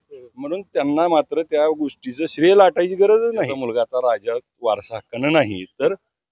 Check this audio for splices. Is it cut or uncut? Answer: cut